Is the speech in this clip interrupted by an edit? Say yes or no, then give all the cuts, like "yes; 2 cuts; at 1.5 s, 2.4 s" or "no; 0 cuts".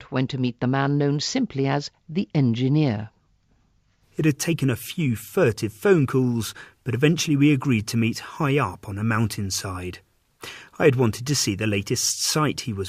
yes; 1 cut; at 10.1 s